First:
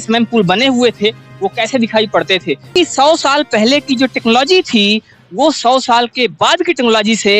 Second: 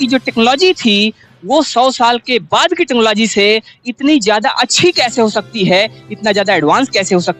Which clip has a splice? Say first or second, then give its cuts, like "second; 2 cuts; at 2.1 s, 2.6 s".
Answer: first; 1 cut; at 2.7 s